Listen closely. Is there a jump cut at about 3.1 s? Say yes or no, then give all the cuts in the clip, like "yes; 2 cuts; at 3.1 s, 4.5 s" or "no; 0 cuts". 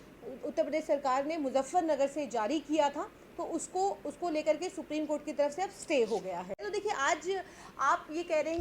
no; 1 cut; at 6.6 s